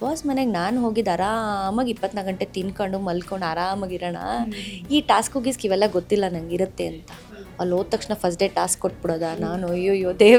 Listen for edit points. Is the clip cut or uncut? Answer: uncut